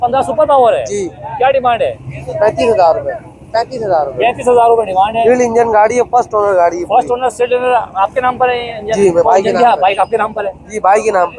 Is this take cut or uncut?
uncut